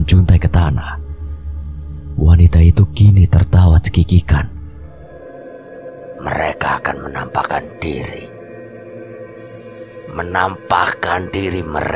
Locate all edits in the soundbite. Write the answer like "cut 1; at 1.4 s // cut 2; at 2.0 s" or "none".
cut 1; at 4.6 s

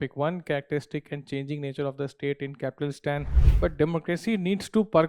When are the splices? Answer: cut 1; at 3.4 s

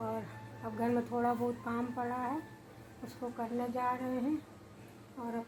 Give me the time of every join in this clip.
none

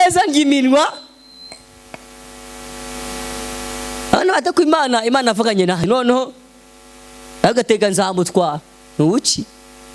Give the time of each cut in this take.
cut 1; at 5.9 s

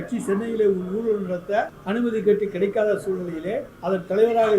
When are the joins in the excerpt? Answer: cut 1; at 1.8 s // cut 2; at 3.7 s

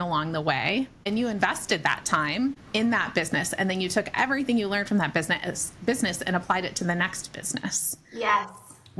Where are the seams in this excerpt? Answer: cut 1; at 1.1 s // cut 2; at 2.6 s

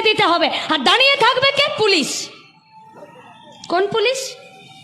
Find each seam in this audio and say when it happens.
none

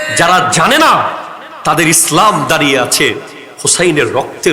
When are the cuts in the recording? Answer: none

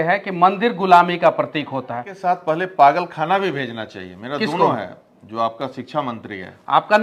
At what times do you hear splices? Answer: cut 1; at 2.1 s

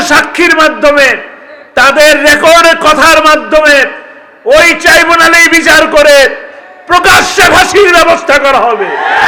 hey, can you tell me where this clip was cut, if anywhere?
none

